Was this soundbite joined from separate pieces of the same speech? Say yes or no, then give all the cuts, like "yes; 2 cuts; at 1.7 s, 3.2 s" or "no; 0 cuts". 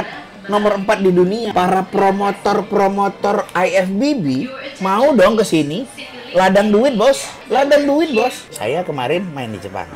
yes; 3 cuts; at 1.5 s, 7.3 s, 8.5 s